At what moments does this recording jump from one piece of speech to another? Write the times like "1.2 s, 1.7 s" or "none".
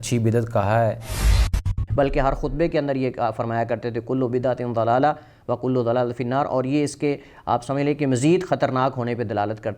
1.3 s